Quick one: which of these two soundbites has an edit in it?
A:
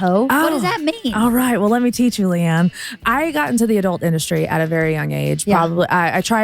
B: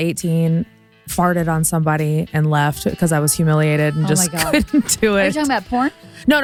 A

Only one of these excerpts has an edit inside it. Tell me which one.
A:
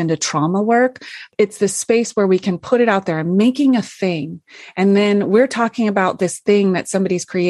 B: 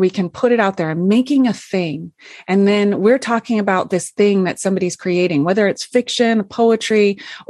A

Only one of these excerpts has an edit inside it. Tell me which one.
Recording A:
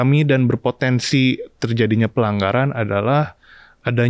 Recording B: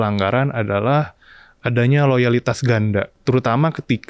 B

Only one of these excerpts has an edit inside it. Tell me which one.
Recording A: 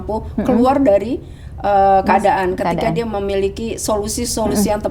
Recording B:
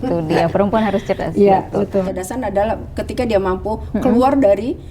B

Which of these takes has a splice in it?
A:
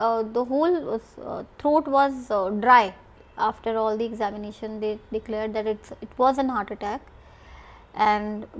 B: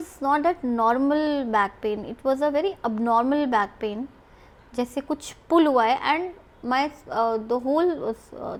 A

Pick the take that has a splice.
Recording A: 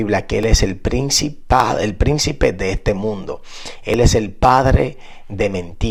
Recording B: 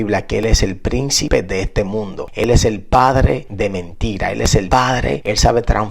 B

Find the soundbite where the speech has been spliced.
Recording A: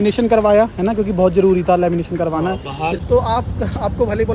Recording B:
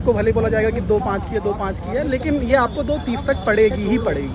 A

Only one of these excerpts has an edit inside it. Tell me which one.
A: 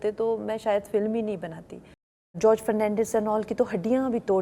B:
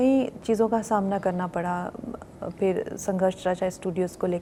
A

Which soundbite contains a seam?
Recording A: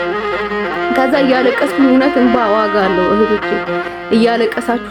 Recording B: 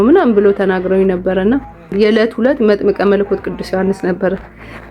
B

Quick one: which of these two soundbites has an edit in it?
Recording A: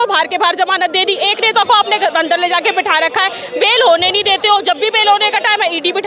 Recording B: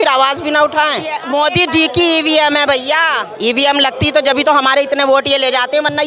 B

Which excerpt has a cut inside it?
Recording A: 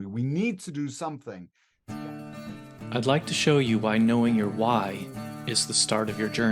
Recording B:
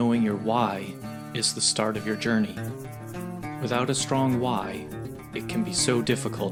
A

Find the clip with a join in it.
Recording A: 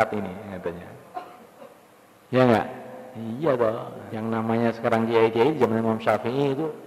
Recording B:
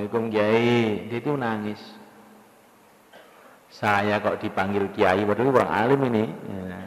A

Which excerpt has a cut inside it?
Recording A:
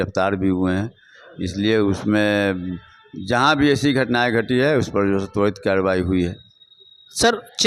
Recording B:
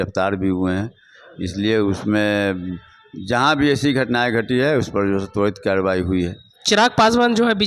B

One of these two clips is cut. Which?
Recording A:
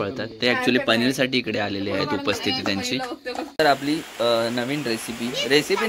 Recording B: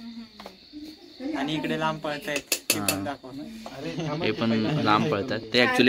A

